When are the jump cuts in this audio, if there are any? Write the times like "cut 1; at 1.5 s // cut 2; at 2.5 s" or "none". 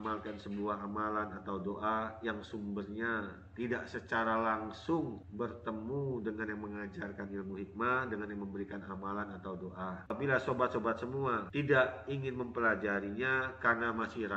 cut 1; at 10.1 s